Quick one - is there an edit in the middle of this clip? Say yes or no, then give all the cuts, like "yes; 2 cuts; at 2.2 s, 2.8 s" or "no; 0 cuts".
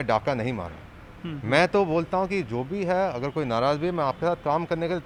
no; 0 cuts